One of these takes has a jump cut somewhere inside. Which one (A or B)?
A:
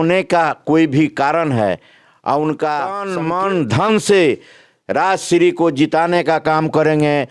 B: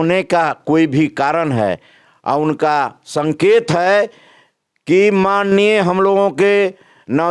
A